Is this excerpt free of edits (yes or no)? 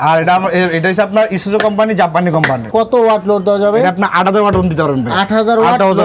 no